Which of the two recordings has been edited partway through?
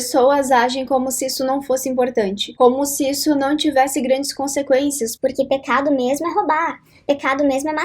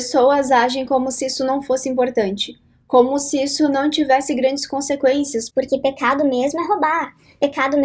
first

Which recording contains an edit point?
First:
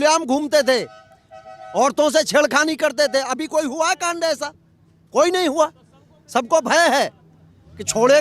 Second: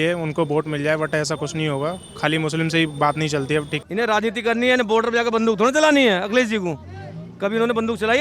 second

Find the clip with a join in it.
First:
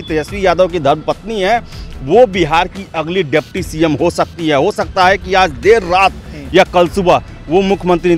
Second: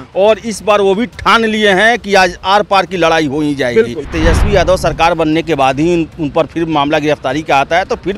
second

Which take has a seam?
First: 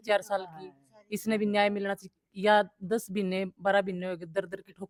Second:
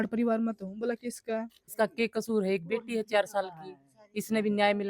second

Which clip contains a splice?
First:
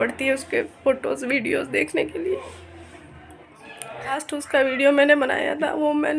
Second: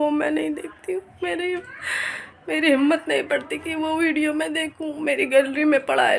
first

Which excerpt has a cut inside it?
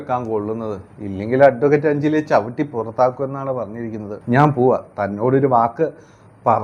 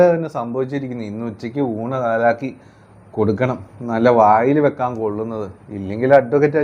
first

